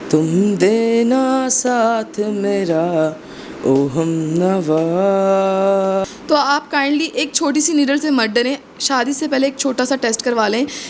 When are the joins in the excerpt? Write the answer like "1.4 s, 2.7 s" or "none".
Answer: 6.0 s